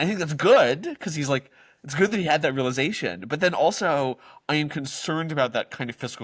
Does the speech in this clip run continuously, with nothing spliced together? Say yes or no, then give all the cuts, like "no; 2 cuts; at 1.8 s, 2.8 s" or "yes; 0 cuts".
yes; 0 cuts